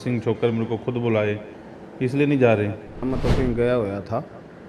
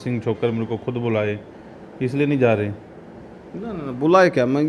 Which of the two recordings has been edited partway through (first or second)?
first